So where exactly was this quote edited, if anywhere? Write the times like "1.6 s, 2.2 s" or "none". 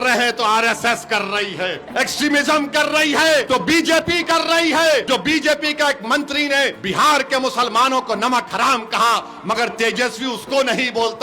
1.8 s, 3.5 s, 5.0 s, 6.8 s